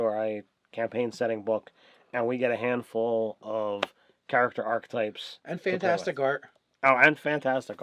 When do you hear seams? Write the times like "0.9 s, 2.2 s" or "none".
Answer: 3.4 s